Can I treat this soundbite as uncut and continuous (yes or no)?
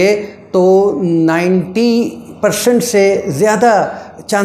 yes